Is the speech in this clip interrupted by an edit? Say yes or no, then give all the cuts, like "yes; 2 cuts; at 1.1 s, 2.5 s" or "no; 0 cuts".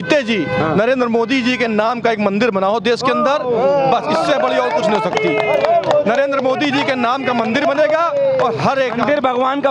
no; 0 cuts